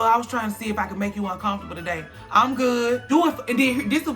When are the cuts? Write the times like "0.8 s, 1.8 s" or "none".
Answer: 3.0 s